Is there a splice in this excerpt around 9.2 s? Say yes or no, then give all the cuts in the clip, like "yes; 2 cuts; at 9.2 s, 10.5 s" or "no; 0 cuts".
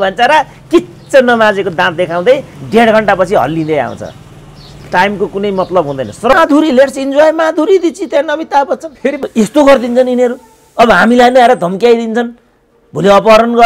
yes; 2 cuts; at 6.3 s, 9.2 s